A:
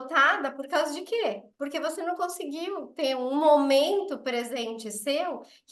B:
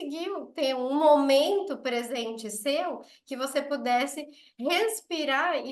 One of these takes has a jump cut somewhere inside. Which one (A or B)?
A